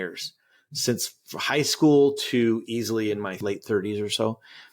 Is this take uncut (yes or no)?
no